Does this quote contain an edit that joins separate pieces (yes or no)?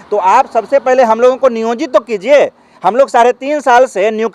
no